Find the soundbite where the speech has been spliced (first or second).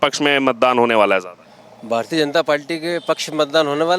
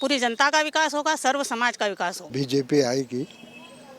second